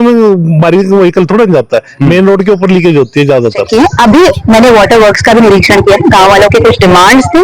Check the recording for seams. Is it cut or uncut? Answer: cut